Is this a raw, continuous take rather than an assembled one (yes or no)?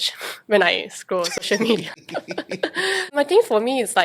no